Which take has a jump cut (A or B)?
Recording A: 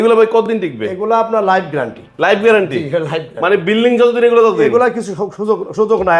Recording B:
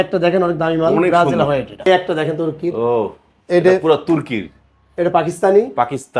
B